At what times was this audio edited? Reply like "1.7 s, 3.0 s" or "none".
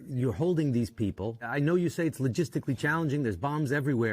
1.4 s